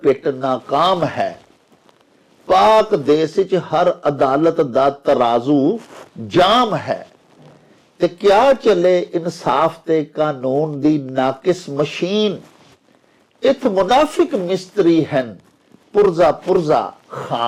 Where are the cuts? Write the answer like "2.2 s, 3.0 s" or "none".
none